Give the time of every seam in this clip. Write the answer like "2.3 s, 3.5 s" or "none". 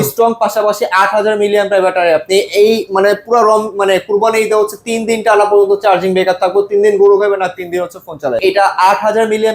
8.4 s